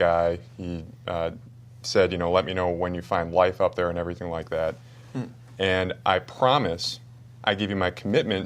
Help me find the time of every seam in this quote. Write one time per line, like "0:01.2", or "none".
0:03.6